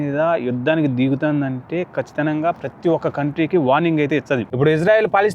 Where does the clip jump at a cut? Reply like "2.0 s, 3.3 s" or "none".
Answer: 4.5 s